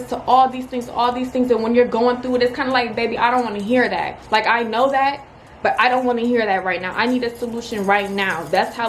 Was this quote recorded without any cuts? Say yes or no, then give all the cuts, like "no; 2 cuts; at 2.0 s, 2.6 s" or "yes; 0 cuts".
yes; 0 cuts